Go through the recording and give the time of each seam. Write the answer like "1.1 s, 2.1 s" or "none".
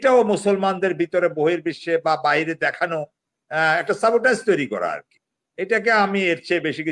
none